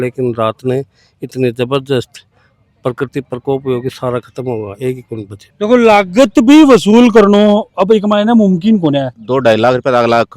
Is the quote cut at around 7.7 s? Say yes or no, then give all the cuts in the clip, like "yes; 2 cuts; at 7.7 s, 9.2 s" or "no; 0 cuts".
no; 2 cuts; at 5.4 s, 9.2 s